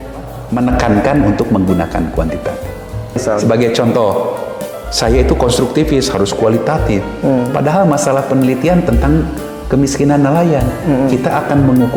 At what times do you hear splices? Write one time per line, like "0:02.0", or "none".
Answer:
0:03.2